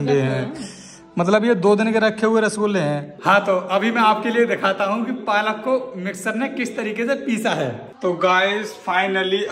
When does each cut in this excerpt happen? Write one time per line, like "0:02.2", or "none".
0:03.1
0:07.9